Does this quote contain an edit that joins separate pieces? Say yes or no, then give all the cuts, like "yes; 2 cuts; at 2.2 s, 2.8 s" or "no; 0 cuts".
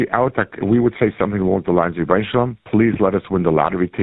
yes; 1 cut; at 2.6 s